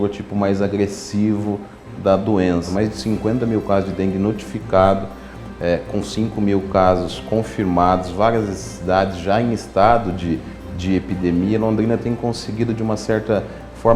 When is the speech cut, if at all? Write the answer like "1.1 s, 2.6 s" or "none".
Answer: 2.7 s